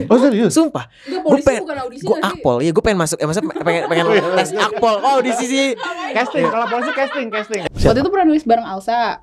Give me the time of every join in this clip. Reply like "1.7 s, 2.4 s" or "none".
7.6 s